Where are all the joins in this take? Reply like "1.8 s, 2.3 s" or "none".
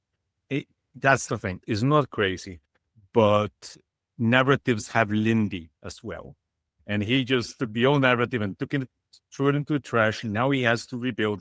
1.5 s

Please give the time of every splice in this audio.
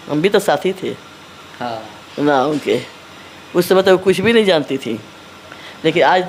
none

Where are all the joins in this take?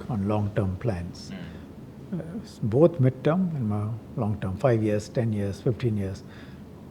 none

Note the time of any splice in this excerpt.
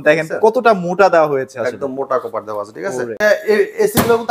3.2 s

